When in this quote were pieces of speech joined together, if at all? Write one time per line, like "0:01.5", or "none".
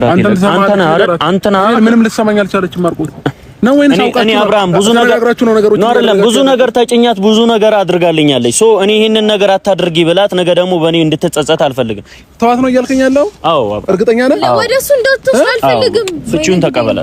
0:08.5